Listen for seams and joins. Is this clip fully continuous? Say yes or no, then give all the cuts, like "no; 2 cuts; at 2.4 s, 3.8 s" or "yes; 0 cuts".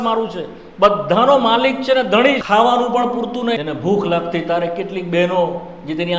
no; 2 cuts; at 2.4 s, 3.6 s